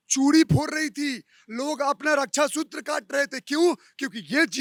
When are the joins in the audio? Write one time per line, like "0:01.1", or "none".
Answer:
none